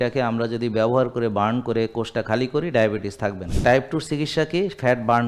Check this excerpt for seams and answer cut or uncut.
cut